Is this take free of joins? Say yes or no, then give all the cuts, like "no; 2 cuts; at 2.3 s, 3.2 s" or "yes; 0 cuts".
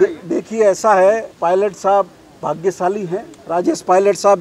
no; 2 cuts; at 1.3 s, 3.3 s